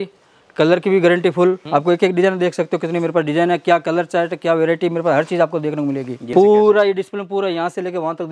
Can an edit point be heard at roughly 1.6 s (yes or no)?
yes